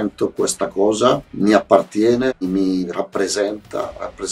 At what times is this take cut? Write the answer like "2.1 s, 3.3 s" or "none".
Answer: 1.3 s, 2.4 s

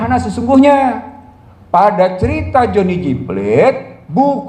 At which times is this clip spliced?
none

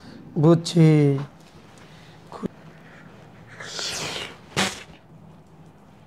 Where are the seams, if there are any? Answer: 2.5 s, 5.1 s

